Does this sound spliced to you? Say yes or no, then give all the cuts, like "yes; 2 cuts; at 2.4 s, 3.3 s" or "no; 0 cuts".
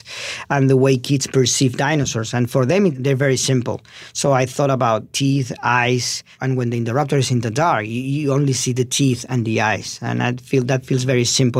yes; 3 cuts; at 3.0 s, 5.1 s, 6.3 s